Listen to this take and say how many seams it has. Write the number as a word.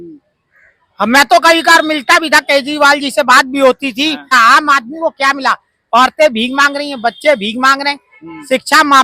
one